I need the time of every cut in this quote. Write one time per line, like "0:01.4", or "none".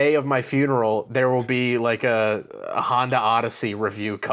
none